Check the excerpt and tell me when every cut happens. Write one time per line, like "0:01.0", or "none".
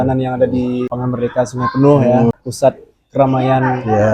0:00.9
0:02.3